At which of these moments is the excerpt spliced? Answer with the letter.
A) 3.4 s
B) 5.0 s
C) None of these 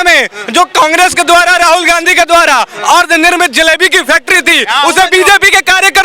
C